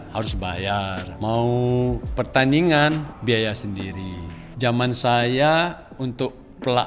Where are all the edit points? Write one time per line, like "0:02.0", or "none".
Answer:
0:01.1
0:02.0
0:03.1
0:04.4